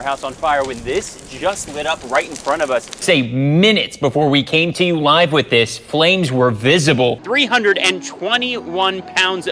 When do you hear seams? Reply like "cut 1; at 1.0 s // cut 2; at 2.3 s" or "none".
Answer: cut 1; at 3.0 s // cut 2; at 7.2 s